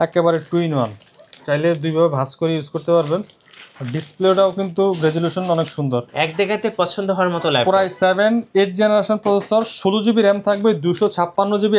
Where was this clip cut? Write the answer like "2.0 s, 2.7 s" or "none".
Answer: none